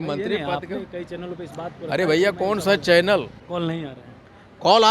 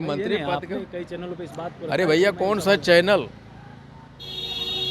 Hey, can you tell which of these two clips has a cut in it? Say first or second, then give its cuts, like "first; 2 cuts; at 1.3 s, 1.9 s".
first; 1 cut; at 3.4 s